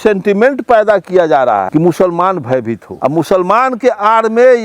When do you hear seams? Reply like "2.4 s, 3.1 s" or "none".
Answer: 1.7 s, 2.8 s

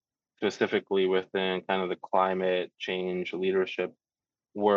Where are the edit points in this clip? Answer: none

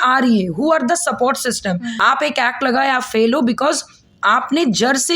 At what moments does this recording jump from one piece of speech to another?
1.9 s

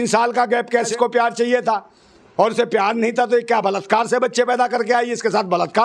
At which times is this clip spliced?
0.9 s

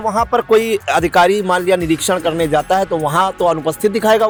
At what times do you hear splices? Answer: none

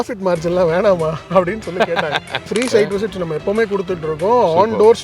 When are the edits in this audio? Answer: 2.5 s

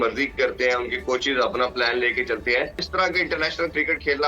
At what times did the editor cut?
2.8 s

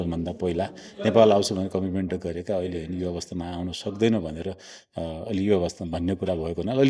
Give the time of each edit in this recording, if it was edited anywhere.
none

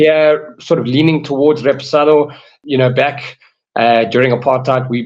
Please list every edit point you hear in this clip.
2.5 s

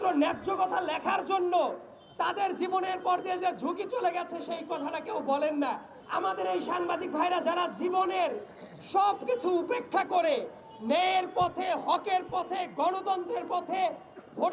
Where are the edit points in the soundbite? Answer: 5.9 s

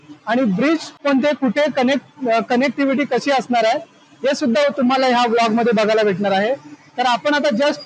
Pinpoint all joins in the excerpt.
1.1 s

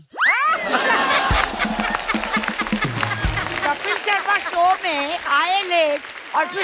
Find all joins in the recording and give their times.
3.5 s

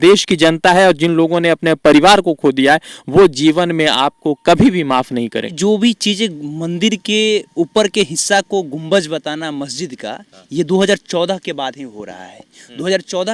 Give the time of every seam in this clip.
5.6 s

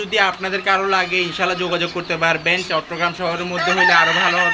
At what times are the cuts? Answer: none

